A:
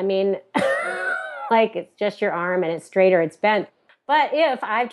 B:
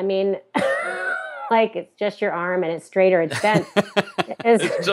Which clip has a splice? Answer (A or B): A